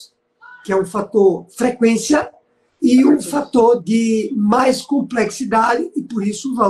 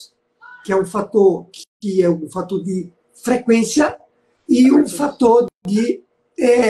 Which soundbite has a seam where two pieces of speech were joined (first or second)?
first